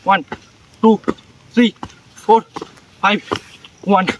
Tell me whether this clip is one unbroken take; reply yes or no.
yes